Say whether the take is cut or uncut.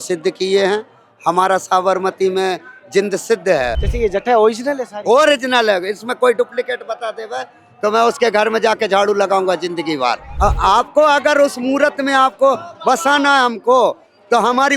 cut